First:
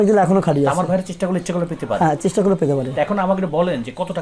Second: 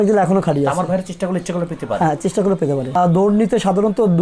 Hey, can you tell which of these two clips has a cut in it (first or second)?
second